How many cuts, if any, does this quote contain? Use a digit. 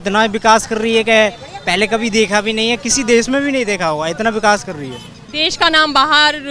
0